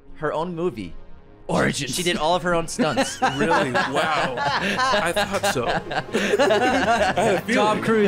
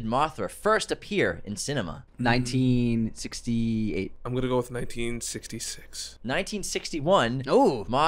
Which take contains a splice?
second; 2 cuts; at 2.0 s, 4.2 s

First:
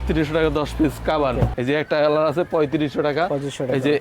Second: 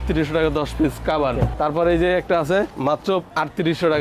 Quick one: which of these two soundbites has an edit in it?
first; 1 cut; at 1.5 s

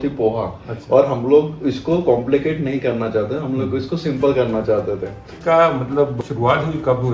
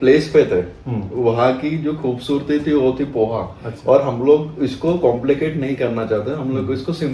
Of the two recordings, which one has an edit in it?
first; 2 cuts; at 5.3 s, 6.2 s

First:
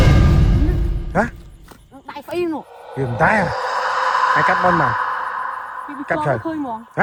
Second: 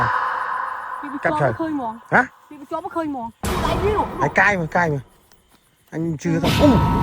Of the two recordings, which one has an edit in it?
second; 1 cut; at 3.4 s

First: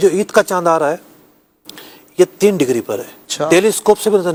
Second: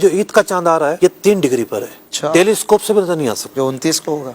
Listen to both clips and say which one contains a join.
second; 2 cuts; at 1.0 s, 3.4 s

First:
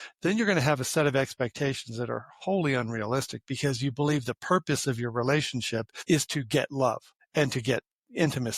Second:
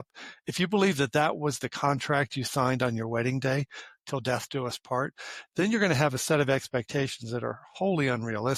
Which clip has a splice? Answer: first; 2 cuts; at 5.9 s, 7.1 s

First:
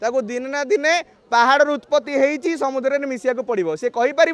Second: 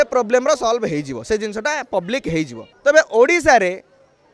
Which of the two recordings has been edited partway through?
second; 1 cut; at 2.6 s

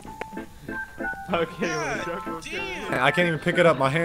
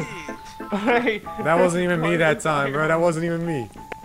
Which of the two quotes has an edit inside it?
first; 1 cut; at 3.0 s

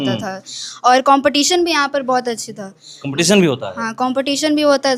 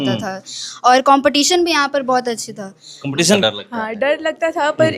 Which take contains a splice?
second; 1 cut; at 3.4 s

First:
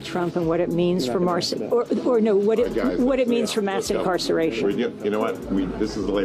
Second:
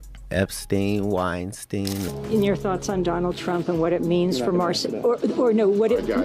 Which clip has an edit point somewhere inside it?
second; 1 cut; at 2.1 s

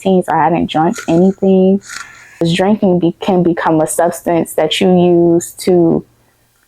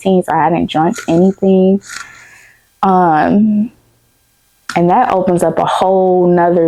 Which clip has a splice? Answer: first; 1 cut; at 2.4 s

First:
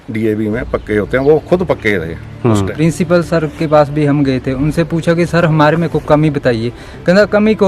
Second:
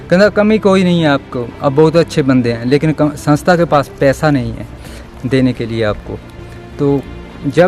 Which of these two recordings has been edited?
first; 1 cut; at 2.6 s

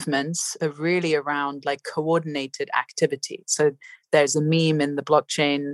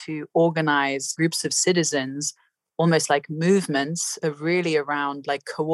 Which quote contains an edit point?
second; 1 cut; at 1.1 s

